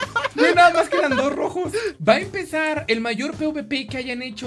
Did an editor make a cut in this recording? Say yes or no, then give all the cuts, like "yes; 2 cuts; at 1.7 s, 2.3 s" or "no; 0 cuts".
yes; 1 cut; at 2.0 s